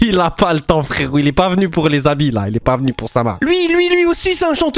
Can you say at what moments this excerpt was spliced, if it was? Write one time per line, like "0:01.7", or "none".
0:03.4